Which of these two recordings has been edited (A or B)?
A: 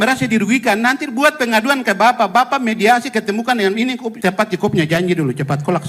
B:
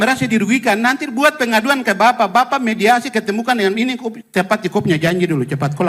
A